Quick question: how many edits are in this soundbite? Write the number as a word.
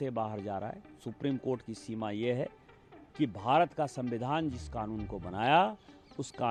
zero